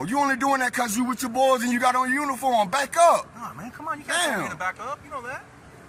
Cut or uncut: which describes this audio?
uncut